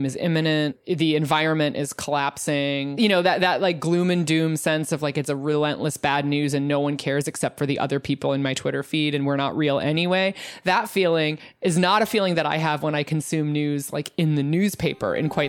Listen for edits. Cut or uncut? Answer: cut